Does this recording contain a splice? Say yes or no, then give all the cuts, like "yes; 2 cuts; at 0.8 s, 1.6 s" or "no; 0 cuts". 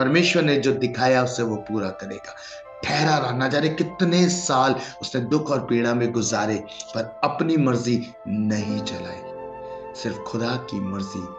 no; 0 cuts